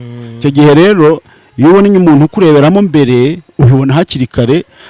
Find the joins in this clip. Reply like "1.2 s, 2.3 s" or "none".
none